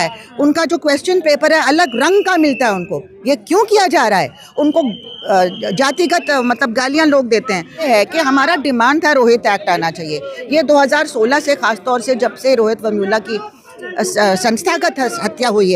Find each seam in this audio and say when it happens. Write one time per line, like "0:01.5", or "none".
0:07.8